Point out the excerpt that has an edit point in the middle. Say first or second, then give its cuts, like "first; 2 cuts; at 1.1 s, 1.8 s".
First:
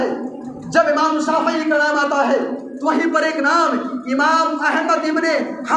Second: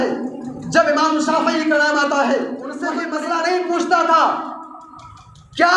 second; 1 cut; at 2.9 s